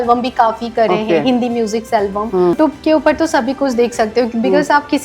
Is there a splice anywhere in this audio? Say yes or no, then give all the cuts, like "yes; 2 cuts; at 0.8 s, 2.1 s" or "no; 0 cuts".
yes; 1 cut; at 2.6 s